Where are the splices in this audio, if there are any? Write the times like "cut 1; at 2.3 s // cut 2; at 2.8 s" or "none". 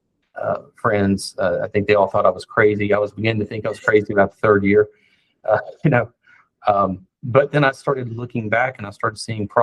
none